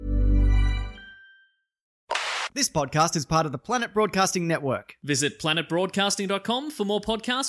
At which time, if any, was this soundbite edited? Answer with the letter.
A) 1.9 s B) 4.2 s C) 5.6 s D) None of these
A